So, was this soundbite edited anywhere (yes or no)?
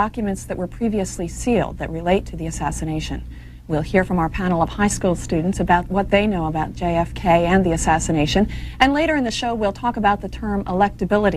yes